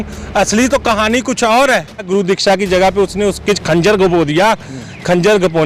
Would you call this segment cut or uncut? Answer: cut